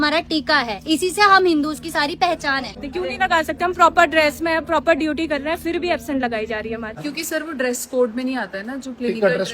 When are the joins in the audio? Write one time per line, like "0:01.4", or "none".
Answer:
0:02.7
0:06.9